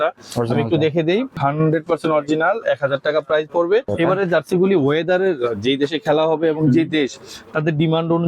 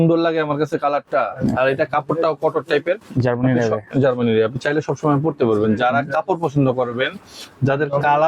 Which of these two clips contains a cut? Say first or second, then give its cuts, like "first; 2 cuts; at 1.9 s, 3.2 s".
first; 2 cuts; at 1.4 s, 3.9 s